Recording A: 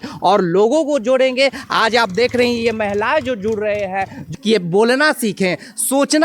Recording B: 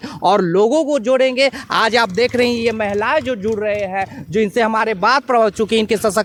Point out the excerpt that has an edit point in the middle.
A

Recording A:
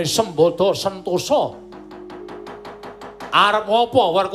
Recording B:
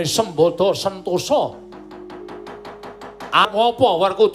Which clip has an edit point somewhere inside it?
B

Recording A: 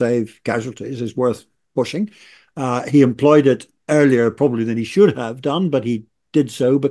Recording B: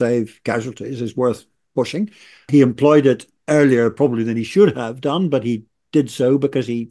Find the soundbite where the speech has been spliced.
B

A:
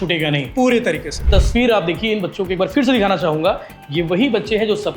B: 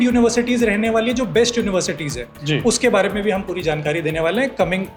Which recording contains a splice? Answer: A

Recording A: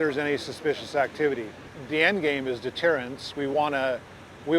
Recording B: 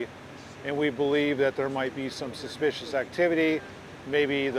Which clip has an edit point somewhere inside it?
A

